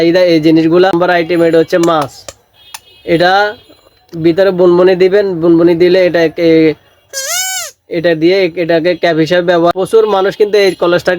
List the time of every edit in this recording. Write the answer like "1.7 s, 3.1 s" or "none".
1.0 s, 9.7 s